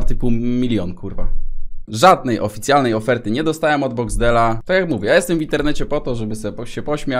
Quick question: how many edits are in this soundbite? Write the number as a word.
two